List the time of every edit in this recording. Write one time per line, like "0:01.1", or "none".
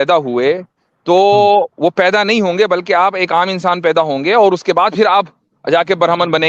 none